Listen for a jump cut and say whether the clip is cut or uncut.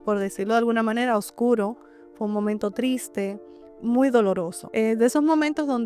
cut